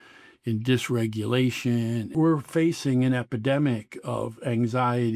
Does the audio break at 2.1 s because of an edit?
yes; 1 cut; at 2.1 s

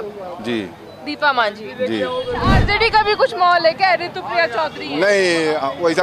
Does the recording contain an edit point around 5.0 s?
no; 1 cut; at 2.6 s

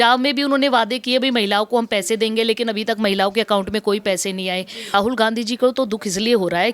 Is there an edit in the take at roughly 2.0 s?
no; 1 cut; at 4.9 s

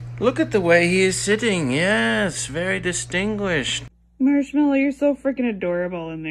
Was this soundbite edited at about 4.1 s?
yes; 1 cut; at 4.1 s

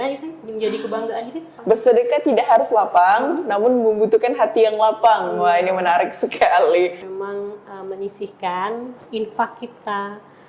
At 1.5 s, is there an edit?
yes; 2 cuts; at 1.5 s, 7.0 s

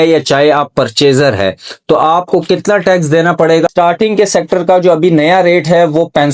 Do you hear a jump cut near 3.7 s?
yes; 1 cut; at 3.7 s

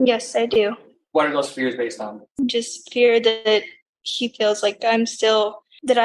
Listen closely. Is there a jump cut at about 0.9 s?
no; 0 cuts

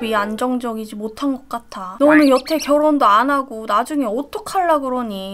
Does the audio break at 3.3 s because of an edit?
no; 1 cut; at 1.9 s

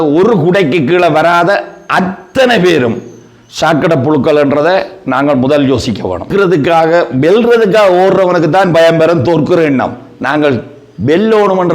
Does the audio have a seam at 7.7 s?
no; 1 cut; at 6.3 s

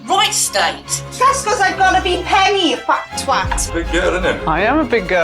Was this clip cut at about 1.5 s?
no; 1 cut; at 3.6 s

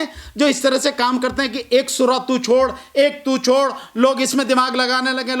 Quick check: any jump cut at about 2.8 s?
no; 0 cuts

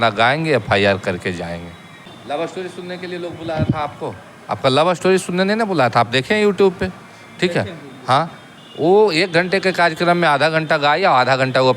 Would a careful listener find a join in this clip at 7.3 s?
no; 1 cut; at 2.2 s

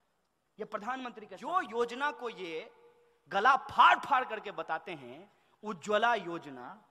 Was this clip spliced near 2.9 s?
no; 1 cut; at 1.4 s

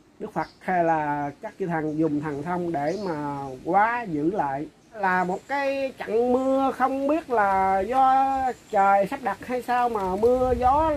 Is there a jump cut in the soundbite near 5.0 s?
yes; 1 cut; at 5.0 s

